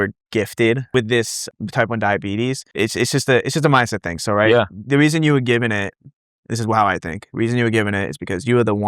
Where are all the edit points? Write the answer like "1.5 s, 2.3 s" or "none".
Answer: 1.1 s, 2.6 s